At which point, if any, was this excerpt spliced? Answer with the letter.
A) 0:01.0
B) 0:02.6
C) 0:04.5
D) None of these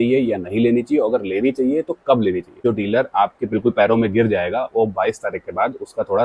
B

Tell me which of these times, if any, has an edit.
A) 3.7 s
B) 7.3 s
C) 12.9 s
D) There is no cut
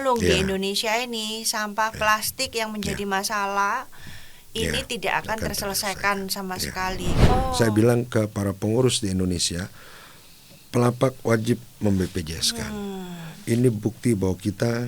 B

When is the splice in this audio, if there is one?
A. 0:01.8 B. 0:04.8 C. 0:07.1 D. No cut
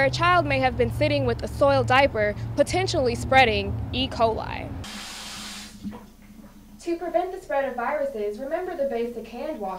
B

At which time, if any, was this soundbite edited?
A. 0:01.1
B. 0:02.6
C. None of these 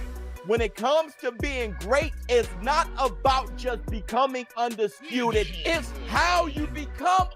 C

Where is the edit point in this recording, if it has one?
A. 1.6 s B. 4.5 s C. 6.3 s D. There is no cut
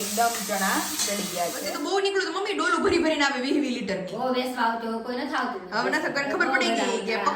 A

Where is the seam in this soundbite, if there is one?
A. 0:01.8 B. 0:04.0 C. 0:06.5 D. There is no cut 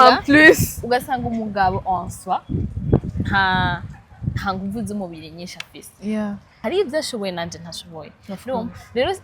C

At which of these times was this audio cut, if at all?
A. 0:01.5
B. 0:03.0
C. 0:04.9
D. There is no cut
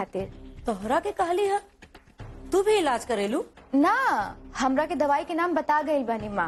D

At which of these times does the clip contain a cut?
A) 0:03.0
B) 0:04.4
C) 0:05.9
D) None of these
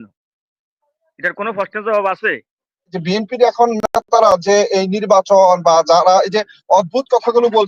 A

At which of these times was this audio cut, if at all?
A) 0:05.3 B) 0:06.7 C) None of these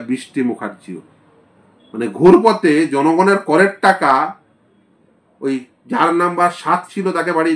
C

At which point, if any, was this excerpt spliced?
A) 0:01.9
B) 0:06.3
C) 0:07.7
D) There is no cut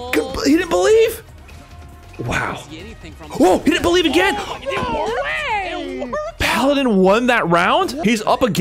B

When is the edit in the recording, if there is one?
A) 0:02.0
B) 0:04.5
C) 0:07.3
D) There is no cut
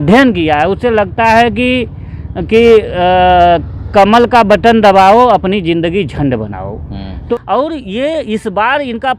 C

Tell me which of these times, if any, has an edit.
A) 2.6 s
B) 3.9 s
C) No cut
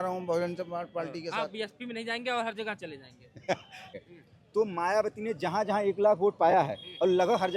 B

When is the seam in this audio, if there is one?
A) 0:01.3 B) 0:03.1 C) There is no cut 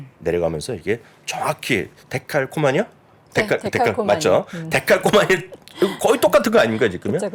C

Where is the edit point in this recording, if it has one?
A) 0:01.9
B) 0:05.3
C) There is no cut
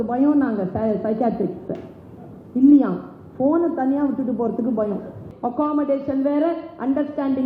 B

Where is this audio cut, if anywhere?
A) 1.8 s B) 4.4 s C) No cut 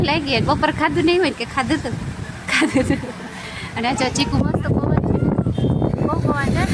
B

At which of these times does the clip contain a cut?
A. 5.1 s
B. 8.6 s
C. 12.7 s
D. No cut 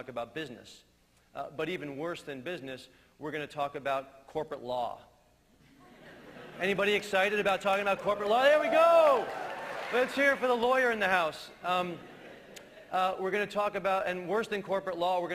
B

